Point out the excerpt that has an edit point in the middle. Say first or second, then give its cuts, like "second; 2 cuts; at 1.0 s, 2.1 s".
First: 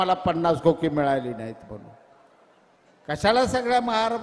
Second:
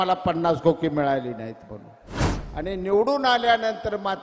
second; 1 cut; at 2.4 s